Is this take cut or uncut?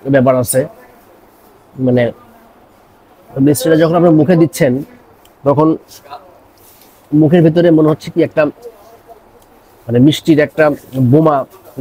uncut